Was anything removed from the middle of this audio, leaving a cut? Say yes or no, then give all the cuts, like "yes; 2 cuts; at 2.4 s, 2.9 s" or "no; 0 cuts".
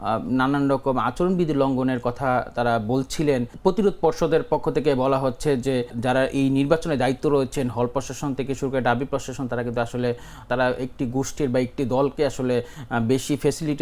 yes; 3 cuts; at 3.5 s, 6.0 s, 10.4 s